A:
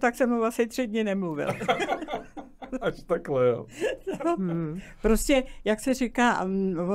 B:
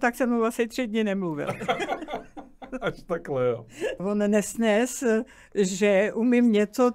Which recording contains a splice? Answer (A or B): B